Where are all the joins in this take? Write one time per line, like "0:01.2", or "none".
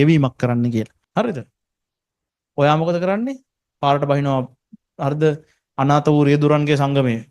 0:01.0